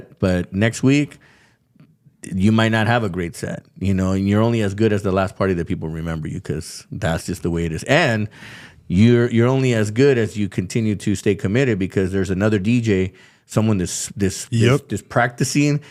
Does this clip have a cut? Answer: no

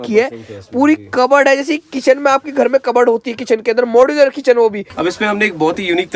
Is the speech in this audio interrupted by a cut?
yes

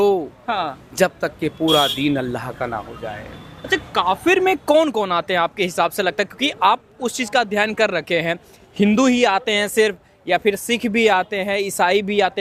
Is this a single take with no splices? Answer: yes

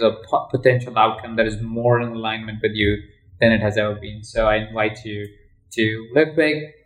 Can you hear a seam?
no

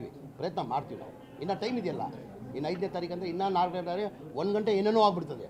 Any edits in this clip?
no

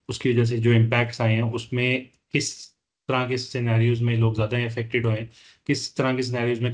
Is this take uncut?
yes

